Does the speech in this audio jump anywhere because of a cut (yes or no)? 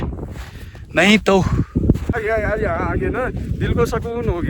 yes